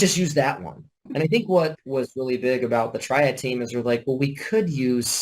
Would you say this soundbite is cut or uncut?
cut